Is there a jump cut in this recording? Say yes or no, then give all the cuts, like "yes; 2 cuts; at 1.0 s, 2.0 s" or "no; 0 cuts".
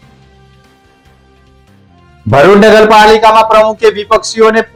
no; 0 cuts